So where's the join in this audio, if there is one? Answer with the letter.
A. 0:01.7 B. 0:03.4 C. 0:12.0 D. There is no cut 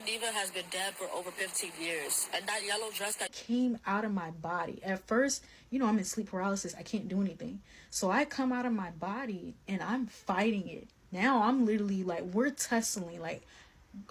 B